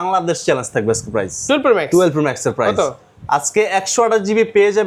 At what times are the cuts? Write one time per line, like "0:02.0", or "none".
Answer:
none